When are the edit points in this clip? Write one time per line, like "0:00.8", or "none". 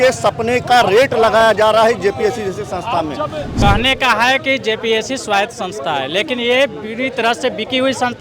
0:03.5

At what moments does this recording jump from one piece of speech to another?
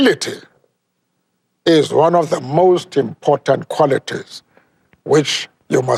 none

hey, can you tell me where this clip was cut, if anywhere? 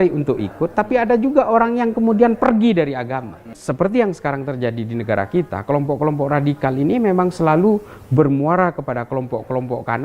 0:03.6

